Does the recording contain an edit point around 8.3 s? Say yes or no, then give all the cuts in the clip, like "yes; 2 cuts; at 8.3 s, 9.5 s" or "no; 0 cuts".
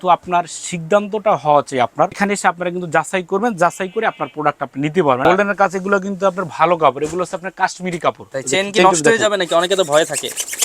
yes; 3 cuts; at 2.2 s, 5.2 s, 8.3 s